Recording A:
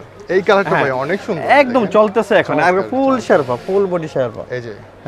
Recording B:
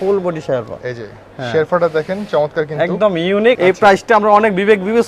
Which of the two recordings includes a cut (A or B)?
B